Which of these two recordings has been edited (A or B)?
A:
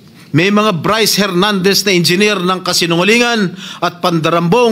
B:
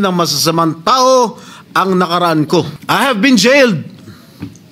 B